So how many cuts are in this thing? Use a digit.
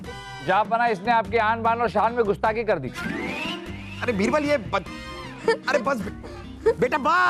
0